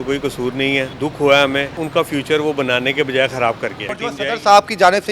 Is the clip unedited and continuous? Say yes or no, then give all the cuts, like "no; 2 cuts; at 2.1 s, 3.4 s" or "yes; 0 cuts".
no; 3 cuts; at 0.9 s, 1.8 s, 3.9 s